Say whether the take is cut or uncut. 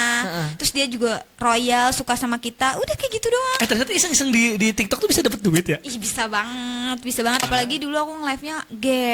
cut